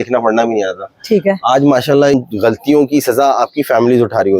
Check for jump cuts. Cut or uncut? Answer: cut